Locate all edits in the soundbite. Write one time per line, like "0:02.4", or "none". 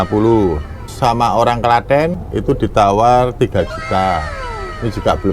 0:00.9
0:02.2